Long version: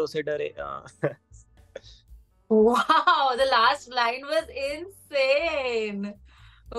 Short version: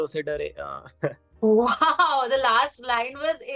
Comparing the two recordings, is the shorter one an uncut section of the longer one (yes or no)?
no